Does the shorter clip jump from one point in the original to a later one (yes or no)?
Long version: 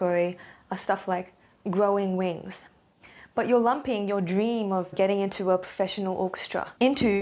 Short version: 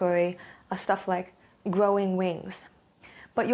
no